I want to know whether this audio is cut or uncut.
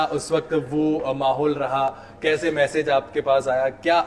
uncut